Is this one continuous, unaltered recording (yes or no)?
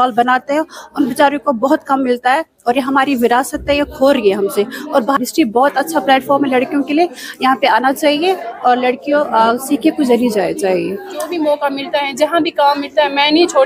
no